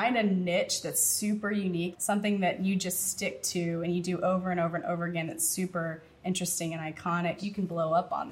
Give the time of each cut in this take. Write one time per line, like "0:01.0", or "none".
0:02.0
0:07.4